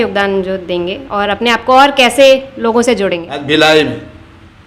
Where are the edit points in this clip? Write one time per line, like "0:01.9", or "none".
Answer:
0:03.3